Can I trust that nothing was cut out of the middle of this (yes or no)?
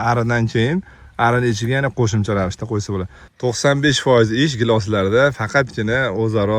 no